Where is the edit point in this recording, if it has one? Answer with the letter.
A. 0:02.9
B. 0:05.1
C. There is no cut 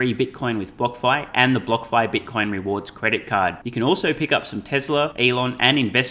B